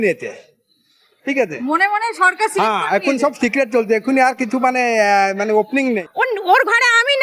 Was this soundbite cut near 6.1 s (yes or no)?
yes